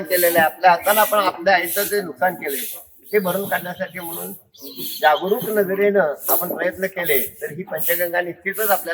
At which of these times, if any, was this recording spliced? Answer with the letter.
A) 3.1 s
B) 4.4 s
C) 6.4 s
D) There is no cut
D